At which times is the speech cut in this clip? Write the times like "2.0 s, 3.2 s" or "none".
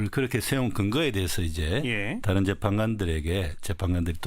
2.6 s